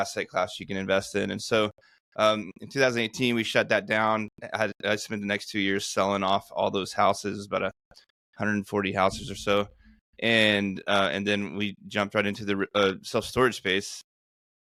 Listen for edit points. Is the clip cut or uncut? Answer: uncut